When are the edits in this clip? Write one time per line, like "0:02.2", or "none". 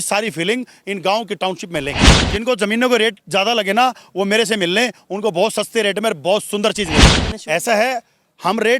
0:02.3
0:07.3